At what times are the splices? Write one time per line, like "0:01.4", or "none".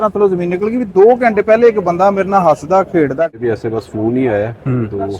0:03.3

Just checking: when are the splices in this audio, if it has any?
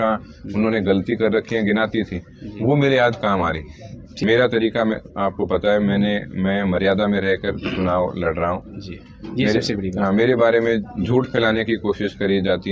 0:04.1

